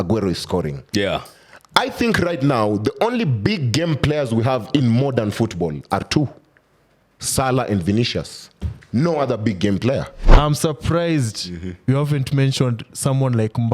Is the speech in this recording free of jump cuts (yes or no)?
no